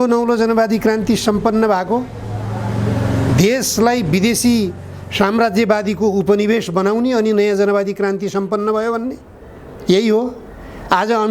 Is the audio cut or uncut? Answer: uncut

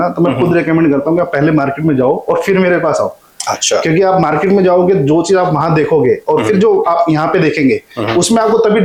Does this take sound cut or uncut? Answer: uncut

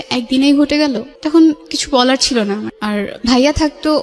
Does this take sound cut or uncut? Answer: cut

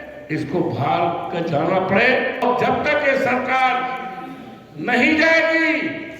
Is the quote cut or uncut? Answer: cut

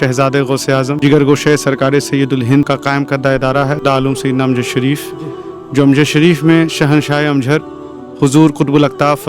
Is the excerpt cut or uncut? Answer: cut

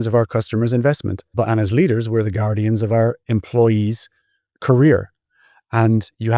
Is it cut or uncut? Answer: cut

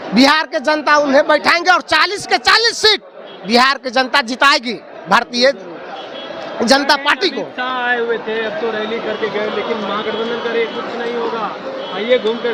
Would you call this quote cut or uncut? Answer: uncut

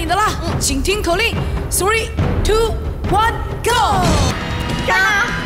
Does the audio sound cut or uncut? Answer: cut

